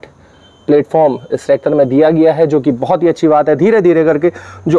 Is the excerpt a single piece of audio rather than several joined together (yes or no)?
yes